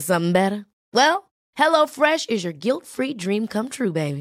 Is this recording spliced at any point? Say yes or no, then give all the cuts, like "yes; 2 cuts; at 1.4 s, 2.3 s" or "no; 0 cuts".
no; 0 cuts